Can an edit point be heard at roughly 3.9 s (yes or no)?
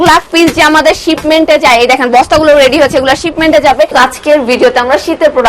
yes